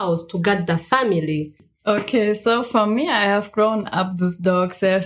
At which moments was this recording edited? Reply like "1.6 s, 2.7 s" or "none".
1.7 s